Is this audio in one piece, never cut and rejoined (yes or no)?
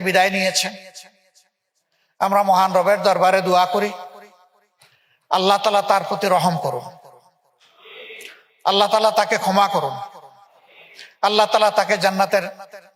yes